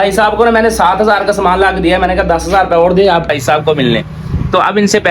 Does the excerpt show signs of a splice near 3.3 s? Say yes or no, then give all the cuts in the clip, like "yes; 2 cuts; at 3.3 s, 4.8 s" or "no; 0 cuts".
yes; 1 cut; at 3.3 s